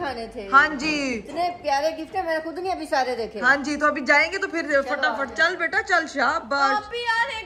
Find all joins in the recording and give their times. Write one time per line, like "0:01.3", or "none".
none